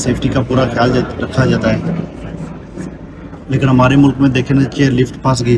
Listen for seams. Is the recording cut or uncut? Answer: uncut